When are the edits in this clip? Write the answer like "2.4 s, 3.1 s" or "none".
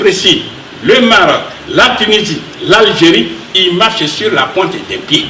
none